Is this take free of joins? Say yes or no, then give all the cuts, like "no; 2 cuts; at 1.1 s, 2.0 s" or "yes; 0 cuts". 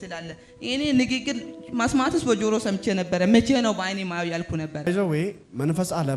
yes; 0 cuts